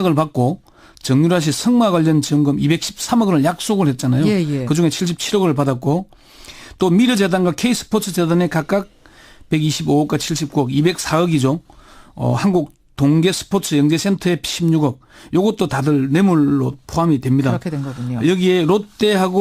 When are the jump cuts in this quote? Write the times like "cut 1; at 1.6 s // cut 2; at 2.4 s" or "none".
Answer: cut 1; at 11.6 s

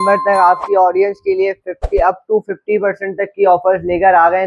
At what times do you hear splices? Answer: none

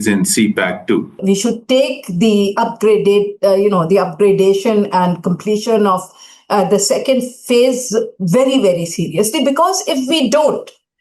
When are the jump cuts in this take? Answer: cut 1; at 1.2 s

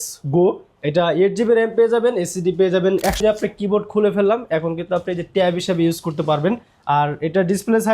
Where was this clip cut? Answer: cut 1; at 3.2 s

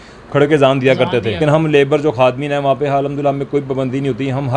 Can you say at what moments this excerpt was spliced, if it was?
cut 1; at 1.4 s

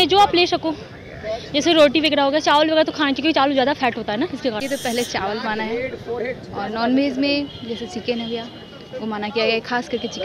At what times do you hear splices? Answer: cut 1; at 4.6 s

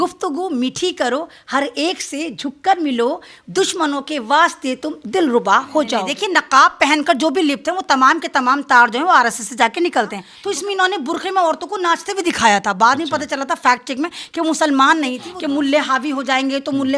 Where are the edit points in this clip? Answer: cut 1; at 3.4 s // cut 2; at 6.0 s // cut 3; at 10.3 s // cut 4; at 15.3 s

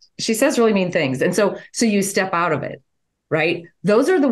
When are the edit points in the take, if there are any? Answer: none

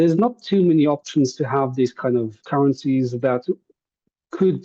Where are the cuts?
cut 1; at 2.4 s

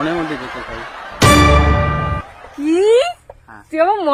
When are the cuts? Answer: none

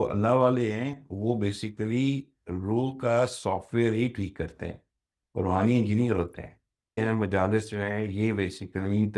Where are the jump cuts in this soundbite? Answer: cut 1; at 7.0 s

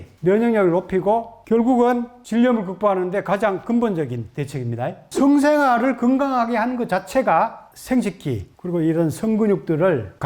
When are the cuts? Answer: cut 1; at 5.1 s

